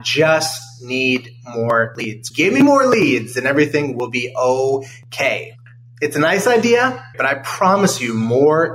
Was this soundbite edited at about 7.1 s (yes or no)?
yes